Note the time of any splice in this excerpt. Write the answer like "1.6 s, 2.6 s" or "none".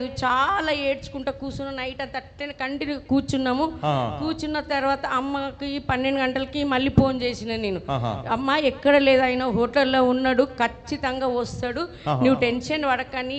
none